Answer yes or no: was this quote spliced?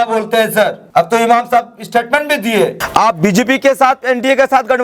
yes